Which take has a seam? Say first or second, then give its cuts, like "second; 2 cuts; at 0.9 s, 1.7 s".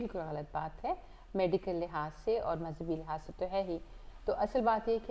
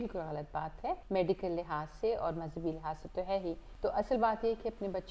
second; 2 cuts; at 1.0 s, 3.7 s